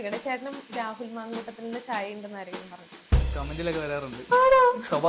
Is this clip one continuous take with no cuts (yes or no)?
yes